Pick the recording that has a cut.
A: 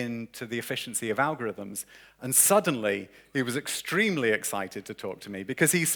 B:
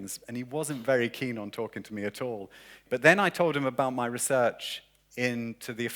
B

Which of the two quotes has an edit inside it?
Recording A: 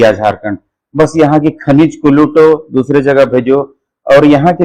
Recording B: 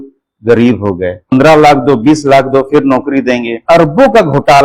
B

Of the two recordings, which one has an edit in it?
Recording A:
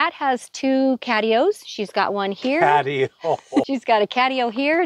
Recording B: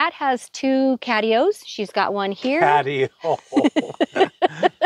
A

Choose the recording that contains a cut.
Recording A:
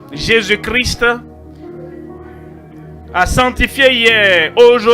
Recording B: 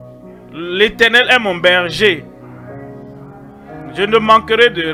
A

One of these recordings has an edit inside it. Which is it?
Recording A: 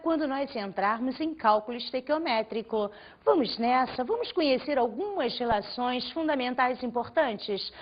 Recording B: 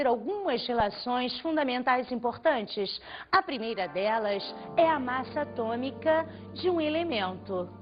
B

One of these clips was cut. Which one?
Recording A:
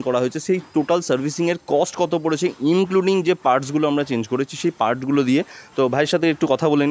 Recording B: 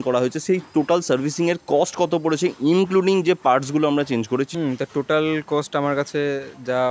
B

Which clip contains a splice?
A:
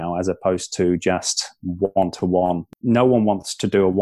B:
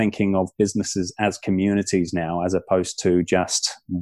A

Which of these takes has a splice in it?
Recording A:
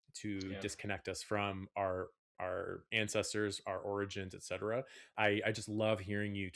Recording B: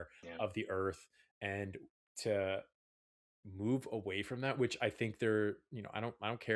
A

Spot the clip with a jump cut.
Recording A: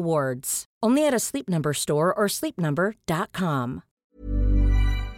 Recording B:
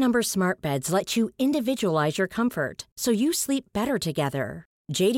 A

